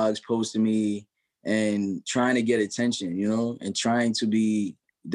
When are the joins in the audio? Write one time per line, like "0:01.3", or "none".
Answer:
none